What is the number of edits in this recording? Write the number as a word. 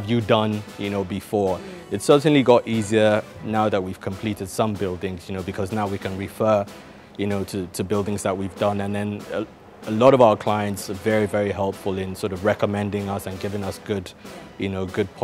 zero